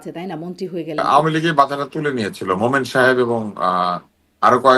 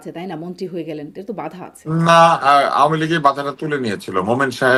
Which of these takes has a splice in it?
first; 1 cut; at 1.0 s

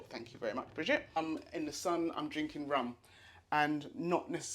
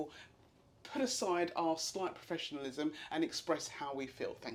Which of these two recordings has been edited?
first; 1 cut; at 1.2 s

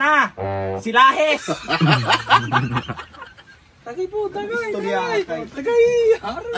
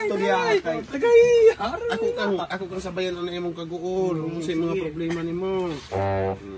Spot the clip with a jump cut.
first; 1 cut; at 3.7 s

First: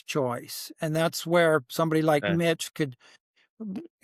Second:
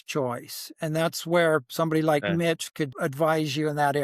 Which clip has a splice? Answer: second; 1 cut; at 2.9 s

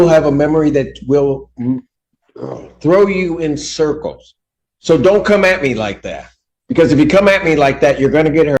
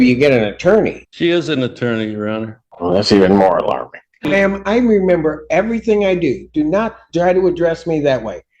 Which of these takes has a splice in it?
second; 3 cuts; at 1.0 s, 2.6 s, 4.3 s

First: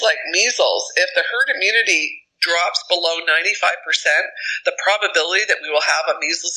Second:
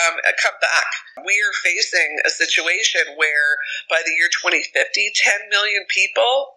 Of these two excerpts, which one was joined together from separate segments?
second; 1 cut; at 1.2 s

